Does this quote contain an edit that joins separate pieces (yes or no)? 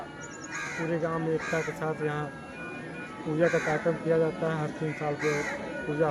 no